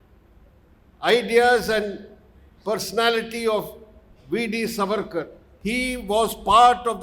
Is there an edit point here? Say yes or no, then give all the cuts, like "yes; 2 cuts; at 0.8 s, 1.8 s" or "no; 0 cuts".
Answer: yes; 1 cut; at 5.4 s